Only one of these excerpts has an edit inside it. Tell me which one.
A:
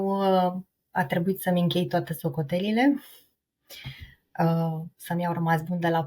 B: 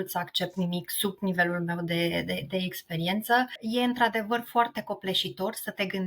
B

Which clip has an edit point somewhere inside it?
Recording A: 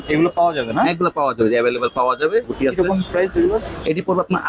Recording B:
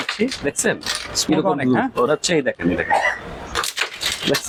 A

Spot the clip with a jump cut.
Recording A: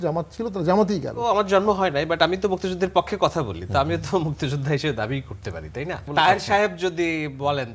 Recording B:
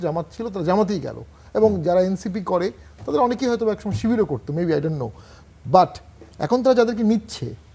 A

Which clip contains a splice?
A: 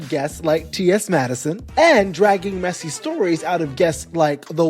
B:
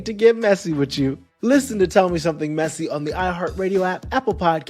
A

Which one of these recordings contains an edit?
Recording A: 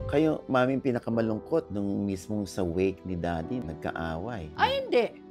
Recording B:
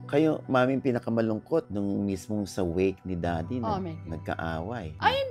A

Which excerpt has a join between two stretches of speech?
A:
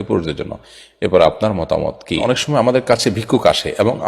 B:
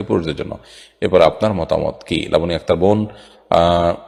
A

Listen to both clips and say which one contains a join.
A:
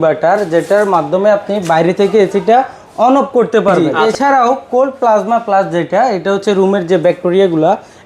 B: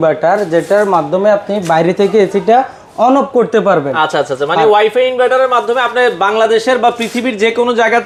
A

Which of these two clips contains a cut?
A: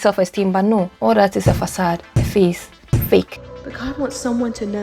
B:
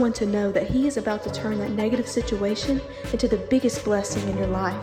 A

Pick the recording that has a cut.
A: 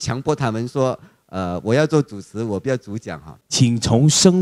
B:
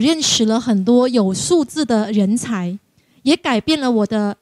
A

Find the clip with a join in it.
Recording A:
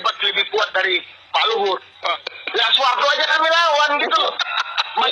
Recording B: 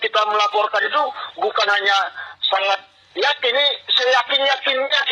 A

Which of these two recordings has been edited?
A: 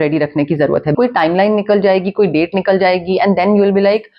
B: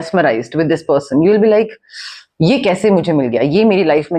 A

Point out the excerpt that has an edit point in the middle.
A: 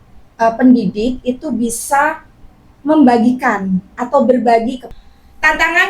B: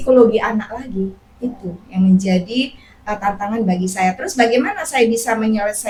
A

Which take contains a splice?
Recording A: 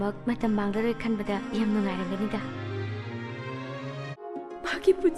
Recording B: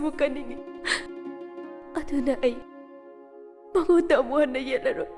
A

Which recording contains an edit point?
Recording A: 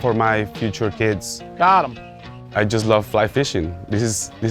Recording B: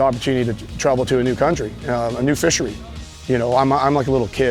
A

